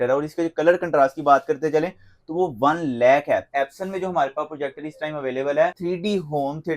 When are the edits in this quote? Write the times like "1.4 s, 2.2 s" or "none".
3.5 s, 5.8 s